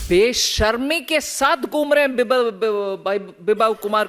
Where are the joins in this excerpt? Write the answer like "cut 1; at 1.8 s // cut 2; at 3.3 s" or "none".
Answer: none